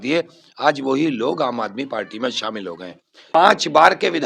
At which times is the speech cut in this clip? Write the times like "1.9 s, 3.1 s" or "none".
3.3 s